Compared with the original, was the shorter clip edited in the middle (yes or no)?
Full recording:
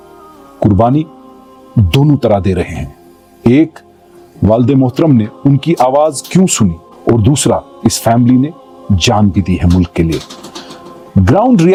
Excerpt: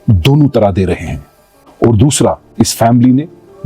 yes